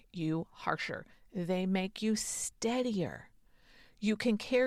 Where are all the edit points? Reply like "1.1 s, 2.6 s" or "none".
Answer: none